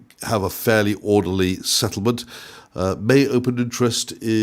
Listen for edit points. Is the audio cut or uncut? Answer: uncut